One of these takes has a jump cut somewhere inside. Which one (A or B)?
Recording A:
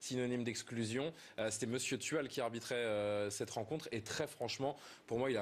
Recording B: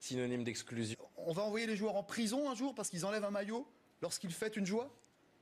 A